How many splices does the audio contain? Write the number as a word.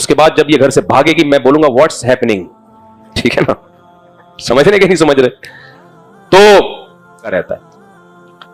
one